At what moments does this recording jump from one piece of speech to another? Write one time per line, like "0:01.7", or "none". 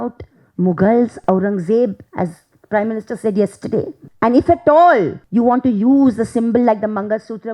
0:04.0
0:05.2